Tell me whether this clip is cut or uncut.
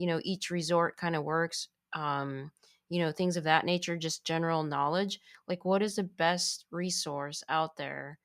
uncut